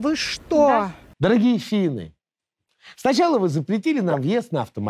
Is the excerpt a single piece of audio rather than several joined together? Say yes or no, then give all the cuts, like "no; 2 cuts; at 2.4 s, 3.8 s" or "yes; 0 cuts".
no; 1 cut; at 1.0 s